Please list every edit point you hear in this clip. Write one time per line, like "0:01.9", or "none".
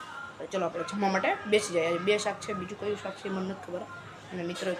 none